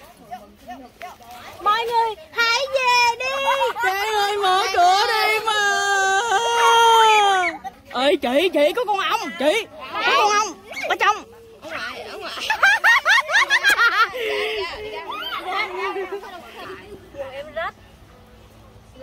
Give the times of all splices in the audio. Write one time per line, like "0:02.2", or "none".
0:07.8
0:12.5
0:16.6